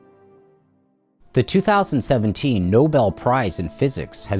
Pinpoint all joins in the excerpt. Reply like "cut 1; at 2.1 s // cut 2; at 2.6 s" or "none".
cut 1; at 1.5 s